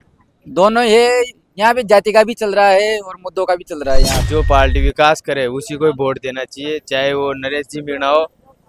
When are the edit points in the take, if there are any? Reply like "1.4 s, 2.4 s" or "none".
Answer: 4.2 s